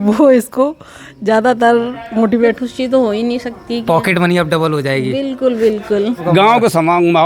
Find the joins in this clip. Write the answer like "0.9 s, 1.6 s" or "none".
2.6 s, 6.3 s